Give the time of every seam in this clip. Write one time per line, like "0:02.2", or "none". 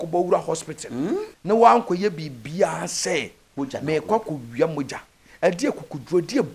0:01.3